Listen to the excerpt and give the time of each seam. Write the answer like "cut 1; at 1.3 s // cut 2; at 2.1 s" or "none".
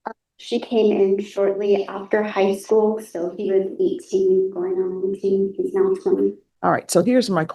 cut 1; at 6.5 s